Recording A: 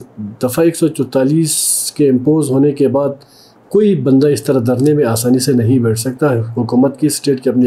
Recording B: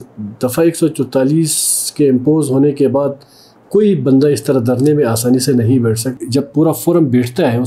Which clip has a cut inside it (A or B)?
B